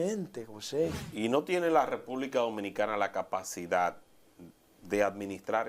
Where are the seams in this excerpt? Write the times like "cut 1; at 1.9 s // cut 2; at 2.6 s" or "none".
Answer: cut 1; at 1.0 s